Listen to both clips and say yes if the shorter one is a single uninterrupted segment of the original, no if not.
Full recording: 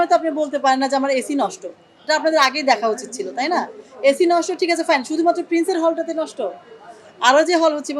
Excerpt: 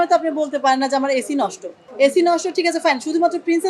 no